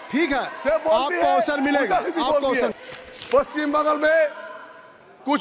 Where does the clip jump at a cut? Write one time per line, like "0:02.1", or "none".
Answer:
0:02.8